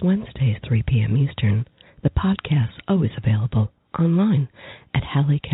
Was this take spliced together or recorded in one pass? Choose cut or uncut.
uncut